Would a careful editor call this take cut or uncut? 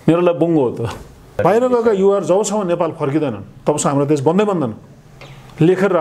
cut